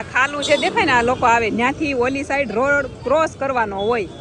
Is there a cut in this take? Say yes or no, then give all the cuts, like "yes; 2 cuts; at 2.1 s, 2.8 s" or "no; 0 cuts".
no; 0 cuts